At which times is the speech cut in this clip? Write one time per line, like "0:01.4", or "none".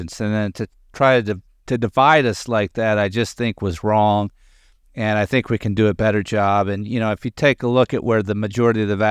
none